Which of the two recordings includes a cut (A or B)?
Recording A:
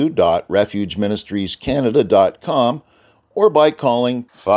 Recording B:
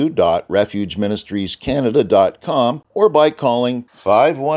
B